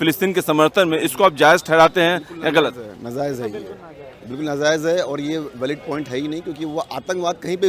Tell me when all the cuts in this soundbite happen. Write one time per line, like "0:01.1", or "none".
none